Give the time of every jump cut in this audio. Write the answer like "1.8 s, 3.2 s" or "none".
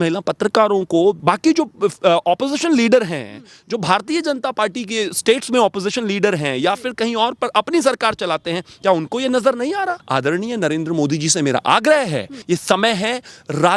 1.2 s, 10.0 s, 12.3 s